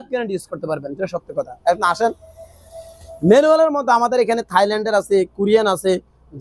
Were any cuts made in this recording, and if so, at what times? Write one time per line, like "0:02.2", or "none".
none